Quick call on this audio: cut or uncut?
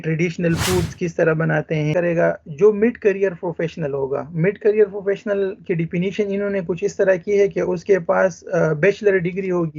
cut